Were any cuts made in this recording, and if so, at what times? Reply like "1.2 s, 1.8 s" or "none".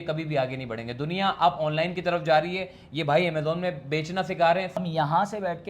4.8 s